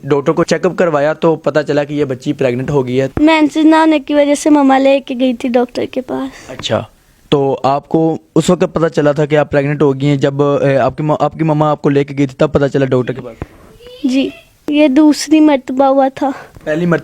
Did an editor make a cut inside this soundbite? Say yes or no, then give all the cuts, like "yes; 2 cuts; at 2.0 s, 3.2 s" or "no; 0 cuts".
yes; 2 cuts; at 3.1 s, 14.5 s